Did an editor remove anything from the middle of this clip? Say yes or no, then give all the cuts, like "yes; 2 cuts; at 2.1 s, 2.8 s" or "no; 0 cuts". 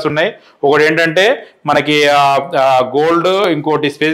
no; 0 cuts